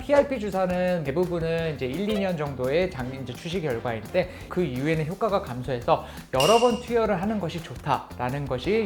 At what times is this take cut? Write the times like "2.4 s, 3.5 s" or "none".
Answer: 1.0 s